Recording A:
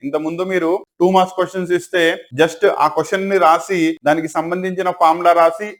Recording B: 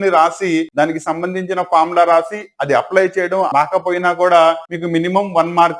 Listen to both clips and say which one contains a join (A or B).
B